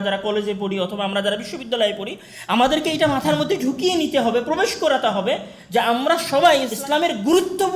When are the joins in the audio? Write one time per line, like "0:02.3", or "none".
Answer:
0:06.7